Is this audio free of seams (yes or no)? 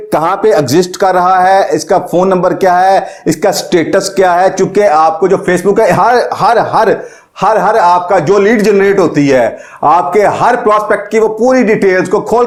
yes